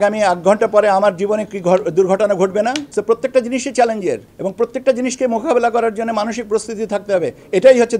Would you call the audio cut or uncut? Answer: uncut